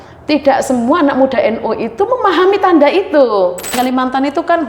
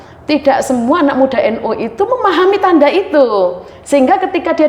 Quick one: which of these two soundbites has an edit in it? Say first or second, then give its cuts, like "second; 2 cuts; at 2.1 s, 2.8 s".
first; 1 cut; at 3.7 s